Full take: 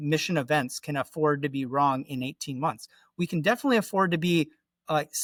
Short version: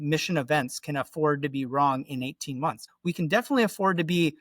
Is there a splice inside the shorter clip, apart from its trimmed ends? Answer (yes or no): yes